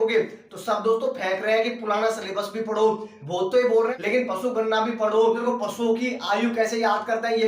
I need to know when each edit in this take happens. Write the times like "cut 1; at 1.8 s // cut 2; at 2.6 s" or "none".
cut 1; at 4.0 s // cut 2; at 5.4 s